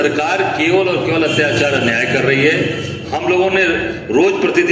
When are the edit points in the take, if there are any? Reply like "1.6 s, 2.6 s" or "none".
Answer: none